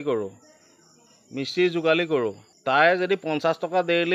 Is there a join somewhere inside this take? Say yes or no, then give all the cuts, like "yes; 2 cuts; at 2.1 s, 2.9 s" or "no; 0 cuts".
yes; 1 cut; at 2.5 s